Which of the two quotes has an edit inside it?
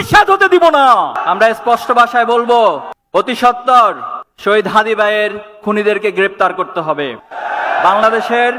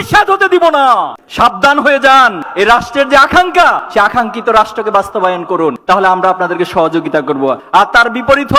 second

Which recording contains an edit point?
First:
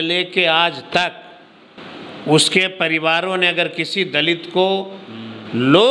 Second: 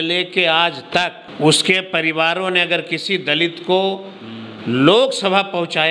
second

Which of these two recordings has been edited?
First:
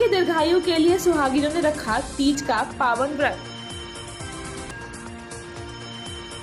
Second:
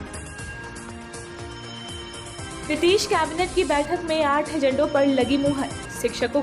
second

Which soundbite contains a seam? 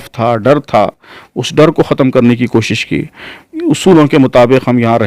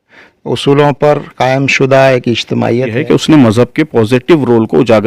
second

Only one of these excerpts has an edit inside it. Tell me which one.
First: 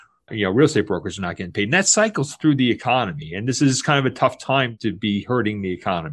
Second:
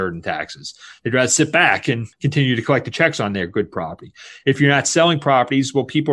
second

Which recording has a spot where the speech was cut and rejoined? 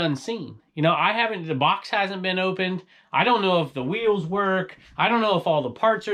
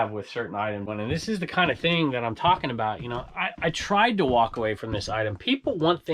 second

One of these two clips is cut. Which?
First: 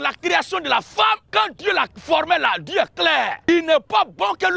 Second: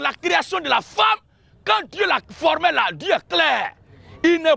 first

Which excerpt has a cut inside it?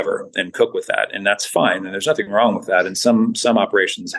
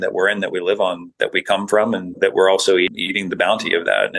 second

